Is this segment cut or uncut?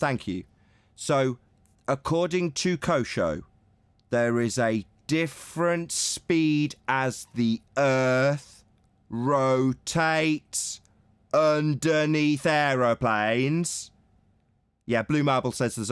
uncut